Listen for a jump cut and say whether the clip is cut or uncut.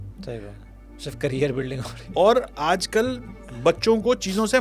uncut